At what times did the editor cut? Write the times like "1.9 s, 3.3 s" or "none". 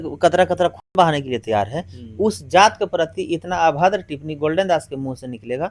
none